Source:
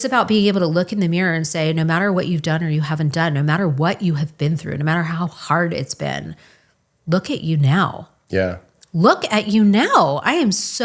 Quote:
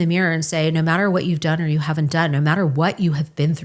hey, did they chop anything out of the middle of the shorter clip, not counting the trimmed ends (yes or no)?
no